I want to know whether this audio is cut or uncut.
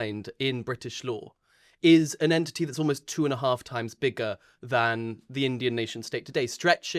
uncut